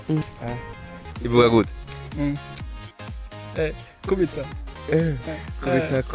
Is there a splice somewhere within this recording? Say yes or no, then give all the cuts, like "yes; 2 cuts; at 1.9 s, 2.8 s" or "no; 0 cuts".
yes; 1 cut; at 1.1 s